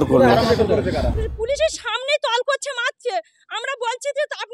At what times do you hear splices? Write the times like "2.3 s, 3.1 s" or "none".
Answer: 1.1 s